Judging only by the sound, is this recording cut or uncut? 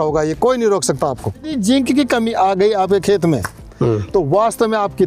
cut